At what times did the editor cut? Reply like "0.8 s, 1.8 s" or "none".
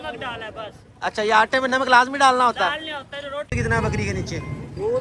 3.5 s